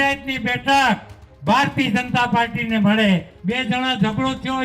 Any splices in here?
yes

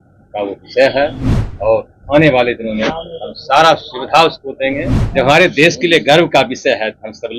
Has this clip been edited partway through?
yes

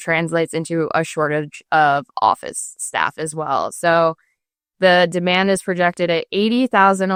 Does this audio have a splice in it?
no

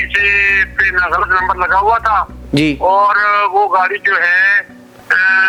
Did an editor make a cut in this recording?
no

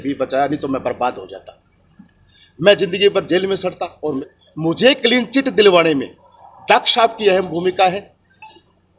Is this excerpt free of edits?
no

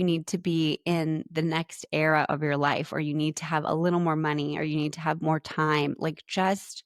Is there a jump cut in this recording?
no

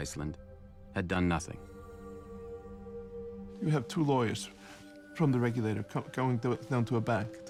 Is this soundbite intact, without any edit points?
yes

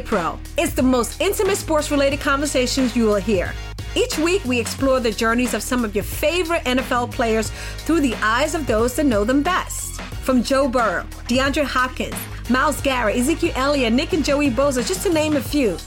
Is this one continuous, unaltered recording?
yes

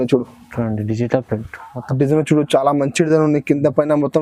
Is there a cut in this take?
no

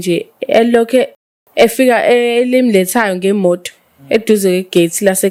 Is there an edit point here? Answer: no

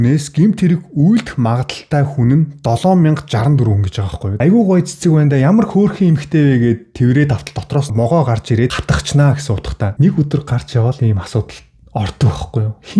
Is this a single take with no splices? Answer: no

